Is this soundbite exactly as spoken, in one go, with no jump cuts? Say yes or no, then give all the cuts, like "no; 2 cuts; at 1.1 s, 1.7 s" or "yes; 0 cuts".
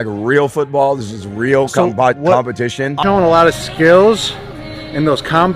no; 1 cut; at 3.0 s